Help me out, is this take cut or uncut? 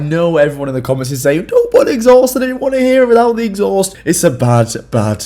cut